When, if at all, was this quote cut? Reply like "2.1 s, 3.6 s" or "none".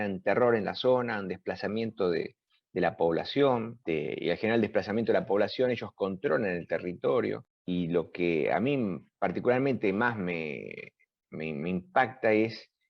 3.8 s, 7.5 s